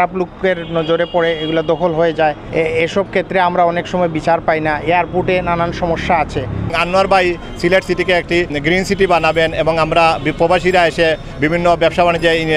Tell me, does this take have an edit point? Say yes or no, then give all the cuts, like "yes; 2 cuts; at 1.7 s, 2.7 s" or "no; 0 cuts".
yes; 3 cuts; at 2.4 s, 6.8 s, 8.5 s